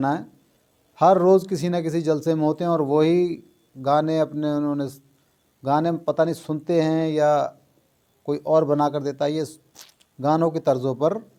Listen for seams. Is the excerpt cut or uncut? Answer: uncut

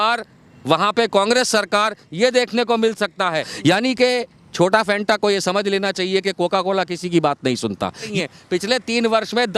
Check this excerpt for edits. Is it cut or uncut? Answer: cut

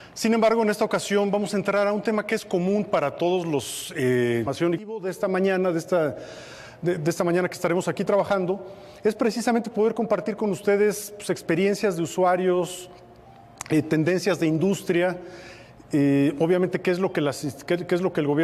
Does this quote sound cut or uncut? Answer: uncut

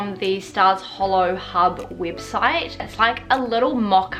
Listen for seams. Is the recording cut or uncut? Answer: cut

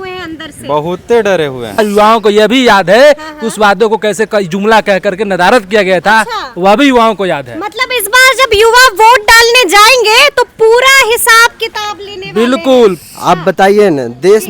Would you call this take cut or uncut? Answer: cut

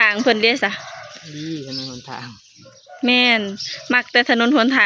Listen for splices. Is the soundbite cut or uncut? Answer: uncut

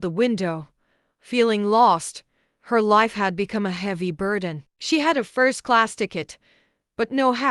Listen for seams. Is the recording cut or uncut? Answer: cut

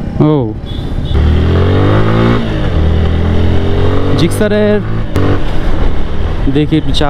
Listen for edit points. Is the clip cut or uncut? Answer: cut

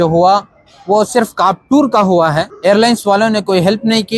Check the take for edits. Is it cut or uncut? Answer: cut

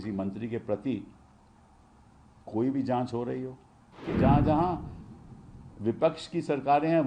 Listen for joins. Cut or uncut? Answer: cut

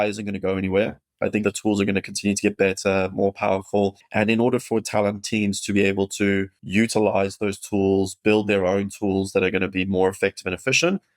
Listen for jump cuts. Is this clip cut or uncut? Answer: cut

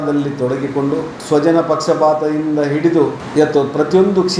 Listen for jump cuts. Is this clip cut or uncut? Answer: cut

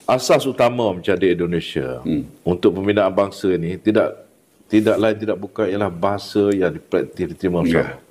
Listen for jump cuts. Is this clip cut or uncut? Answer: uncut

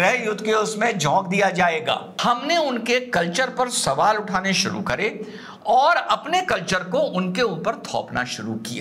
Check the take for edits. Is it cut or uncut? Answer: cut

